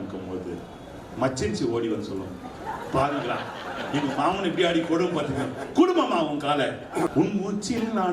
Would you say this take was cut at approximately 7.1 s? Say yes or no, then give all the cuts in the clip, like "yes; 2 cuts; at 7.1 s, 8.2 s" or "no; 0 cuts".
yes; 1 cut; at 7.1 s